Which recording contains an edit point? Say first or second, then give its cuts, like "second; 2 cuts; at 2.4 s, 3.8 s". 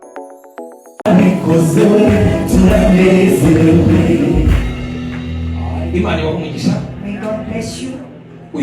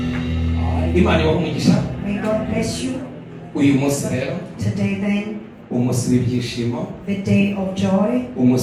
first; 1 cut; at 1.0 s